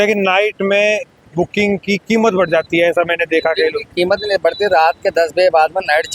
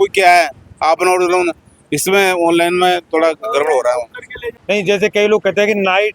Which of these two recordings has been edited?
second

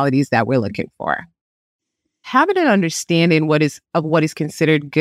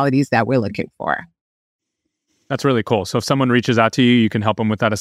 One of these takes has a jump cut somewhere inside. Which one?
first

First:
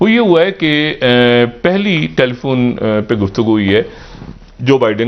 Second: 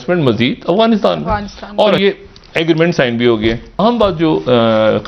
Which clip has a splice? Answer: second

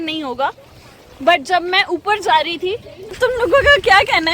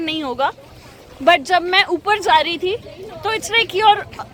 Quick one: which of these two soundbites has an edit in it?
first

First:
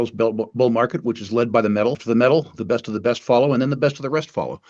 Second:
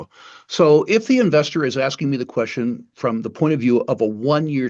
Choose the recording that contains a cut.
first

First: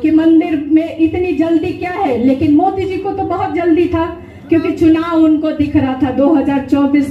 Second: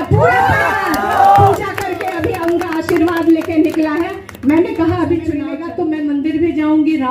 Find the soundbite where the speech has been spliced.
second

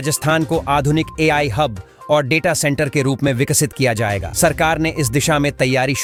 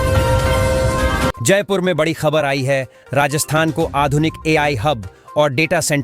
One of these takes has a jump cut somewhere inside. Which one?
second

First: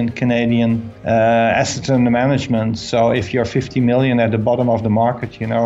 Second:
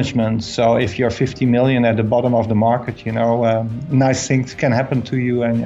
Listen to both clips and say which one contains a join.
first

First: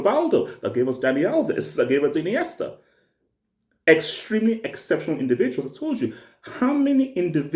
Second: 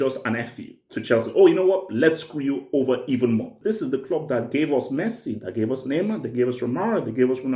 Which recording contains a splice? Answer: second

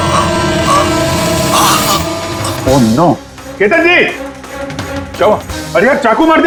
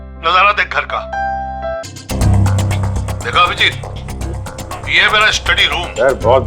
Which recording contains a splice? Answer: second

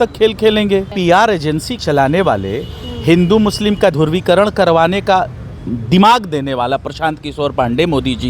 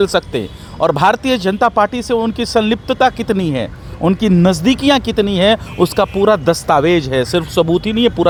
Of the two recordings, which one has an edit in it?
first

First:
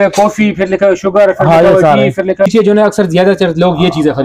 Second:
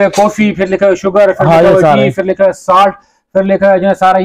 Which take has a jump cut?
first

